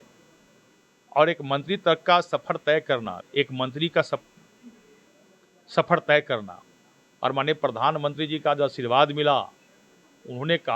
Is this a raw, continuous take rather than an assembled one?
no; 1 cut; at 3.1 s

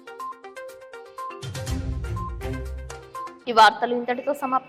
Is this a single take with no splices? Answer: yes; 0 cuts

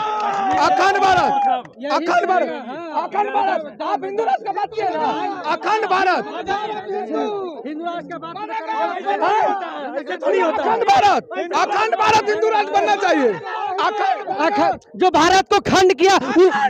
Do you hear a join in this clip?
no; 0 cuts

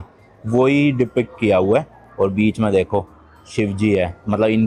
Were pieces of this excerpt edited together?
no; 0 cuts

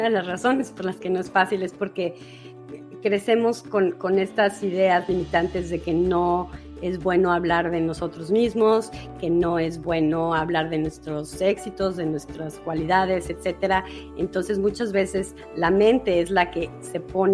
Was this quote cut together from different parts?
no; 0 cuts

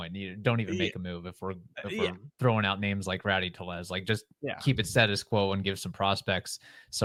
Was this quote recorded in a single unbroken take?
yes; 0 cuts

